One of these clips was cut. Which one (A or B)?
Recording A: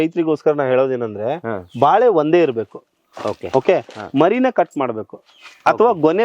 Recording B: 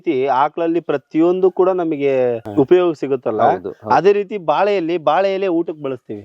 B